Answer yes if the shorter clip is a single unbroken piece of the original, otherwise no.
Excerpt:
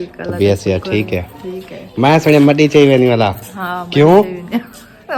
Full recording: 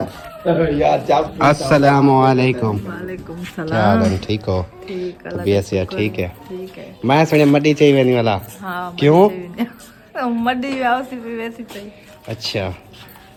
yes